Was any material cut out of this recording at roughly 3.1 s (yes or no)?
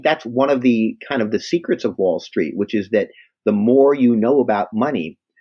no